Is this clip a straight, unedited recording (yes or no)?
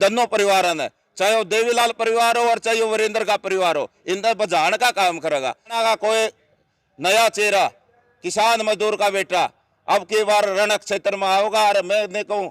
no